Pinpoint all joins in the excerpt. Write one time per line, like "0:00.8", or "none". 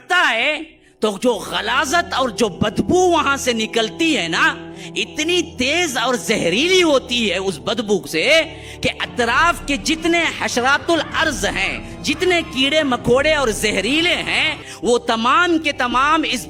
none